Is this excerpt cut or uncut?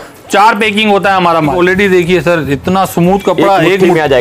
cut